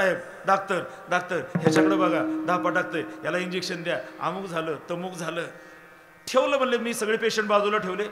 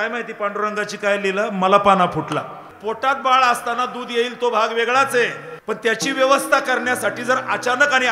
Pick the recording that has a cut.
second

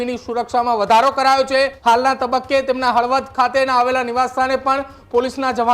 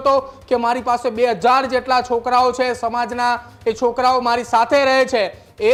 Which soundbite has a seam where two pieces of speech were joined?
first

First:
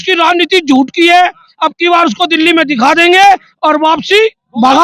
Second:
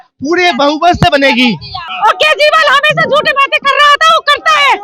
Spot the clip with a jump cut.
second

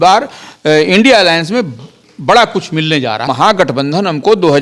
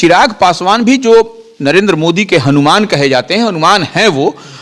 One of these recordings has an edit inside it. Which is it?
first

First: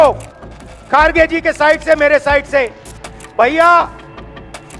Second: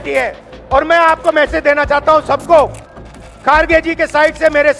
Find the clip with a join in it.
first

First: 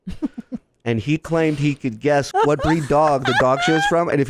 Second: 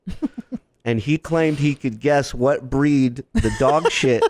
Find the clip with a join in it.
first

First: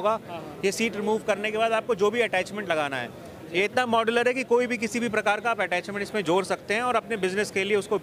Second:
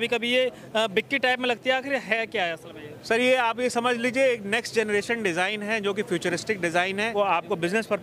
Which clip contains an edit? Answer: second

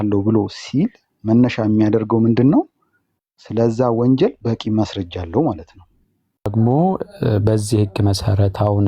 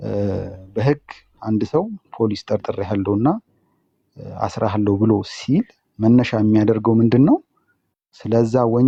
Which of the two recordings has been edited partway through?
first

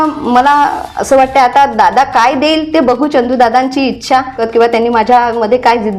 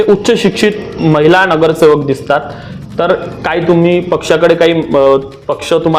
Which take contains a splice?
first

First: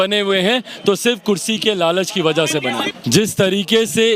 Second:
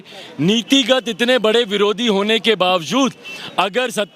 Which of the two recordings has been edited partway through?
first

